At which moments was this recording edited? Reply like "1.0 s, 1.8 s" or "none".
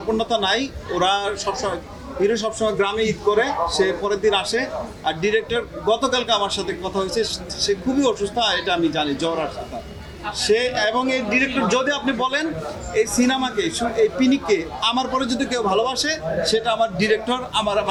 none